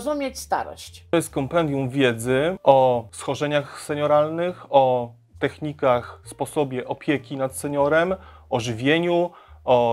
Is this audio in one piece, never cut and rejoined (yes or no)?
no